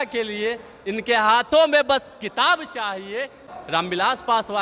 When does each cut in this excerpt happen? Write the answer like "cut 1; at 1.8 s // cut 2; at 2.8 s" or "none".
cut 1; at 3.5 s